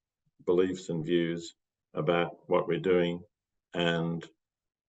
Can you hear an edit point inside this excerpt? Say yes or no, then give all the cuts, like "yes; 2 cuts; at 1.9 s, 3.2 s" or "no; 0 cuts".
no; 0 cuts